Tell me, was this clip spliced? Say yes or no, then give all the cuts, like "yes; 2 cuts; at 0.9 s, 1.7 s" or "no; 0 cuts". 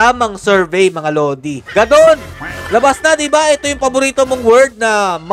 yes; 1 cut; at 1.5 s